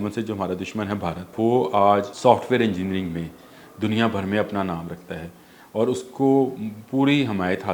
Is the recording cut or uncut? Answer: cut